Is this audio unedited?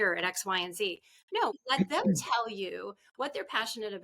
no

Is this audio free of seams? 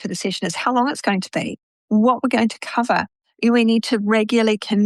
yes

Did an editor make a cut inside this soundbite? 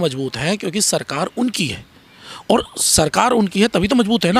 no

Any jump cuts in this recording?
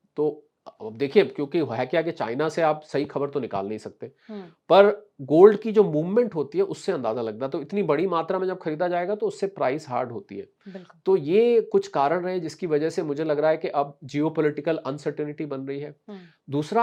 no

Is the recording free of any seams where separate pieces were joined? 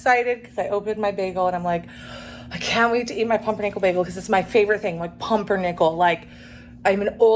yes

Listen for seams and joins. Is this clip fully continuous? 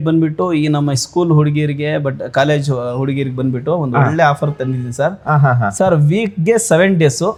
yes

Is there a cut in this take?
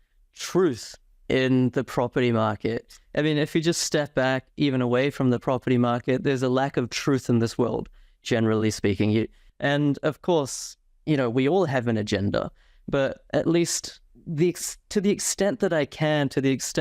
yes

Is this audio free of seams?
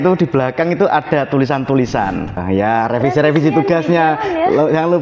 no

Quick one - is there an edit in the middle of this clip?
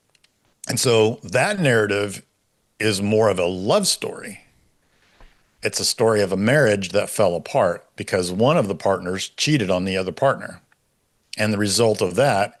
no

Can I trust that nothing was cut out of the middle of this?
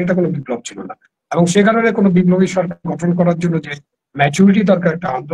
yes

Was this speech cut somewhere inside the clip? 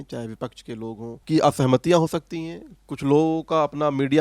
yes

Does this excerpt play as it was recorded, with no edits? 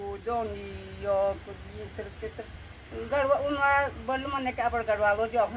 no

